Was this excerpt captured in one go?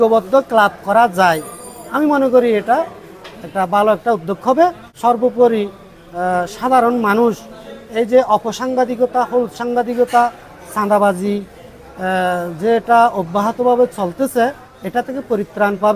no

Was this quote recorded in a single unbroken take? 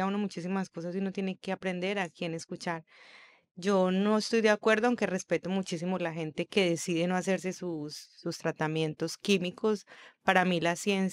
yes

